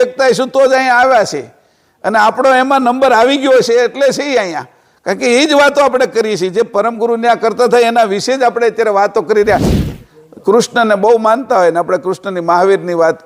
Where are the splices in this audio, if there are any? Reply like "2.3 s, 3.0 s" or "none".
9.8 s